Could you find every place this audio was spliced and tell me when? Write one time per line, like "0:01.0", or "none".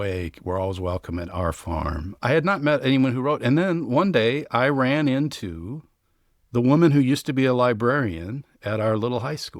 0:02.1